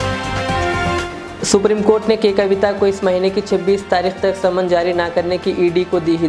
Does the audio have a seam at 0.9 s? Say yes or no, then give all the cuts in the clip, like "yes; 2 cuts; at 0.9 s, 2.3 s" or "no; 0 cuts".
yes; 1 cut; at 0.9 s